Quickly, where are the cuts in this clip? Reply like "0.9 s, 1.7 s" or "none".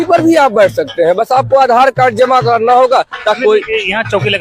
3.4 s